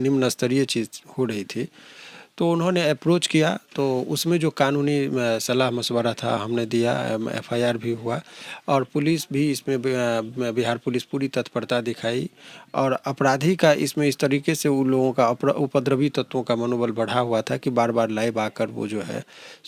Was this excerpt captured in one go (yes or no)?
yes